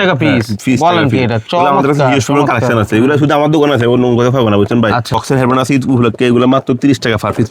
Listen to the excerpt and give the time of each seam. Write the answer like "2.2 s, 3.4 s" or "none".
5.2 s